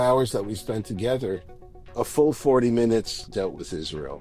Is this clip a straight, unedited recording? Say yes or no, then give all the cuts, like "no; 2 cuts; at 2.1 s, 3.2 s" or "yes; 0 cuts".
no; 1 cut; at 3.3 s